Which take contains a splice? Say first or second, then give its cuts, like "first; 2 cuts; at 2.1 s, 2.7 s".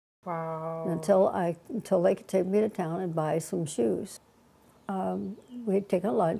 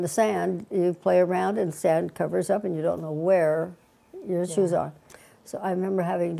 first; 1 cut; at 4.6 s